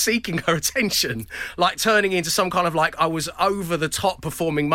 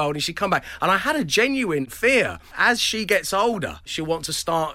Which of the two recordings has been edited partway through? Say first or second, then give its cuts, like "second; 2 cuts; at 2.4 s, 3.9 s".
second; 2 cuts; at 2.2 s, 3.9 s